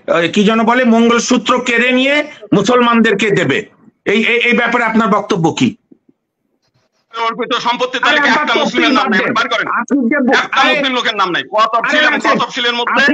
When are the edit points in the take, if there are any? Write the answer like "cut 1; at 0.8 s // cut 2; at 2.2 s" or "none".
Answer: cut 1; at 7.2 s